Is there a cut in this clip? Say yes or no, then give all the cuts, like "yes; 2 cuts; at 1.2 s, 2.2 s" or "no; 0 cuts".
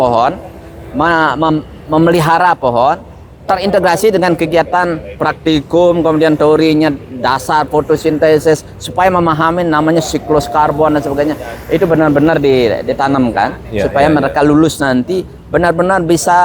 no; 0 cuts